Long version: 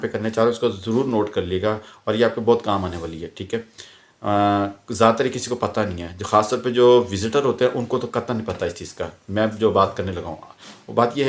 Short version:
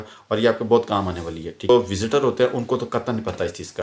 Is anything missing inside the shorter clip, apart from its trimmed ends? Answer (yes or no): yes